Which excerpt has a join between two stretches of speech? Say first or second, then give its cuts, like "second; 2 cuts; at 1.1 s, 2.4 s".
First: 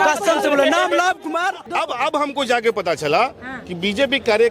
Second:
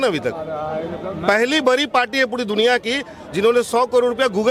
first; 1 cut; at 1.7 s